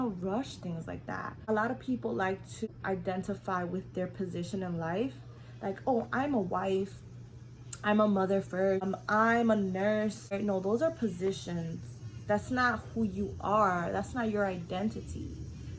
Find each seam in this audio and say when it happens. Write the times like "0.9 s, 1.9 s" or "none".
1.4 s, 2.7 s, 8.8 s, 10.4 s